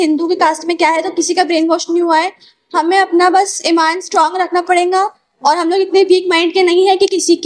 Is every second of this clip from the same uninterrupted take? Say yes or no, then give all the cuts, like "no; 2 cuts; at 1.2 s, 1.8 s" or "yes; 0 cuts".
yes; 0 cuts